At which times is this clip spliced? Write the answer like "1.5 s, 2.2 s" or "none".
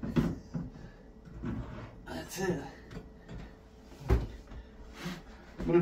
none